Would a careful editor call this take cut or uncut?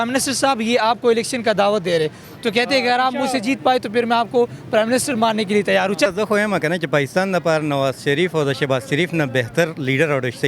cut